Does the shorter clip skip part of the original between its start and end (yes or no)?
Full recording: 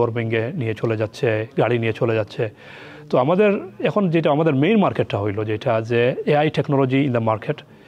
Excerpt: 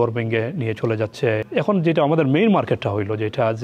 yes